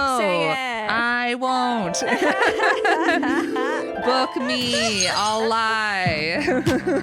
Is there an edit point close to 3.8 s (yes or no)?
no